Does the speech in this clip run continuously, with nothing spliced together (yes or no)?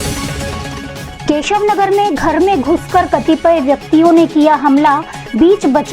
no